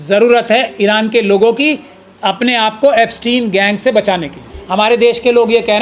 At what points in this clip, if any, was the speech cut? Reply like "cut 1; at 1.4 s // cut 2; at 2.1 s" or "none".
cut 1; at 4.5 s